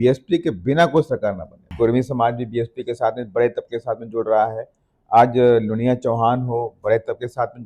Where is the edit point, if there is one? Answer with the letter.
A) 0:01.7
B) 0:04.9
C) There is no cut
A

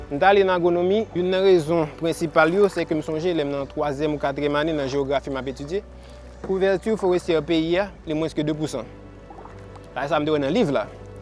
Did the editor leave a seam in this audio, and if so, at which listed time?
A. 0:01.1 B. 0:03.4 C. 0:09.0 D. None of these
A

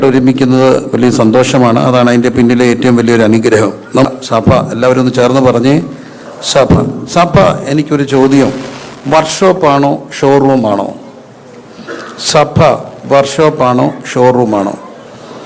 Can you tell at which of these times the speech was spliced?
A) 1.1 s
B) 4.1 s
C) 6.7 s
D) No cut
B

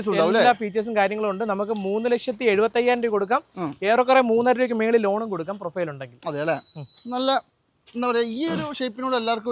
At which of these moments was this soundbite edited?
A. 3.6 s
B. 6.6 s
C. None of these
C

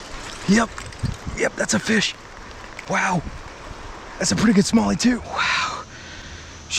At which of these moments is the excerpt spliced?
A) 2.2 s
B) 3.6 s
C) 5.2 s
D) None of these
C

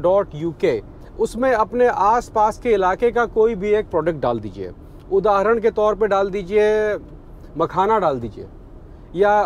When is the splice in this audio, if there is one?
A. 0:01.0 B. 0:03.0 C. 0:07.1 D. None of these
A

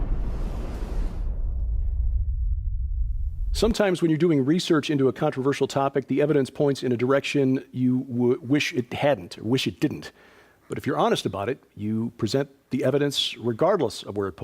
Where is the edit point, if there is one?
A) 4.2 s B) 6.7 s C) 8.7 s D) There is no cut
B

